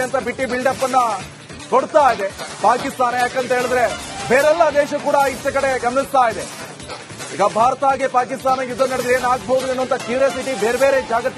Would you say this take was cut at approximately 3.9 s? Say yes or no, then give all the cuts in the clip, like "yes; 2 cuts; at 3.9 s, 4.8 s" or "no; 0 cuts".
no; 0 cuts